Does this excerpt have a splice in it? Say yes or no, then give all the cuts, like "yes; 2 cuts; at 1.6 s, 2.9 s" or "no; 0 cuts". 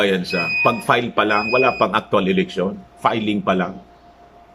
no; 0 cuts